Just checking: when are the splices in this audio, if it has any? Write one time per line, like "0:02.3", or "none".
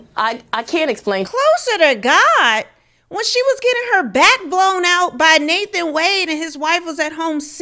0:01.3